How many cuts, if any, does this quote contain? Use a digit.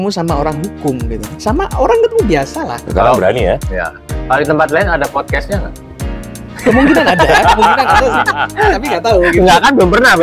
1